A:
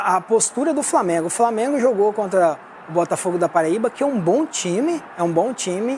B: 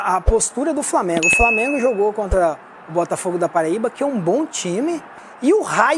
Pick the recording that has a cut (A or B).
B